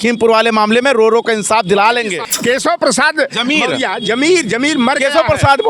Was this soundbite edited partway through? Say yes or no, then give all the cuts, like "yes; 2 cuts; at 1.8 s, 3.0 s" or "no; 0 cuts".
yes; 1 cut; at 2.2 s